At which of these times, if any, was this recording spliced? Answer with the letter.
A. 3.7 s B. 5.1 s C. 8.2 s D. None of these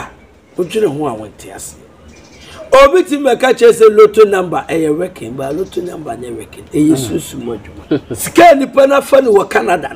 C